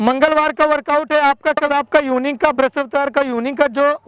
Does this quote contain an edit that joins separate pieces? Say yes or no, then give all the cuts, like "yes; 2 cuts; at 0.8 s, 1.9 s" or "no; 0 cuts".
yes; 1 cut; at 1.7 s